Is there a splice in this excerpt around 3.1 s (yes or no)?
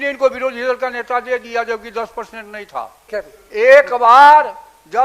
yes